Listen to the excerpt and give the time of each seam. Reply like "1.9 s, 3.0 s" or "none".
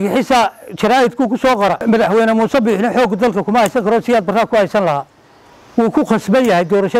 1.8 s